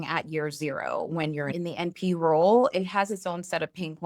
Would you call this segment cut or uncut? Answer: cut